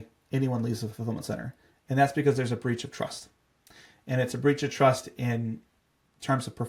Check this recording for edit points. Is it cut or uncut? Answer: uncut